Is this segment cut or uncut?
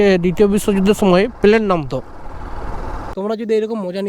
cut